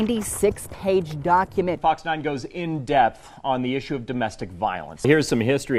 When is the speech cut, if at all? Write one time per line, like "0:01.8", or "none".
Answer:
0:01.8
0:04.9